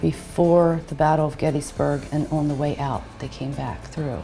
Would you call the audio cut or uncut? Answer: uncut